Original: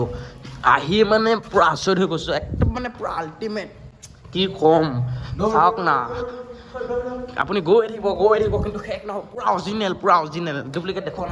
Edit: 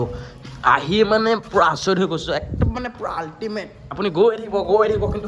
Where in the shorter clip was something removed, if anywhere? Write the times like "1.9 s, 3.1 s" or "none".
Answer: 3.9 s